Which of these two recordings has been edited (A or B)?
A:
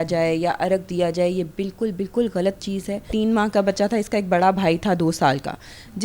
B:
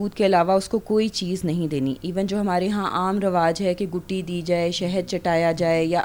A